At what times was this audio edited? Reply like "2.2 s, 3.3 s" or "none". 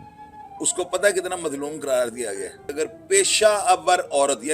2.7 s